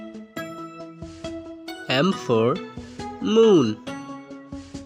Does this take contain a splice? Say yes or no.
yes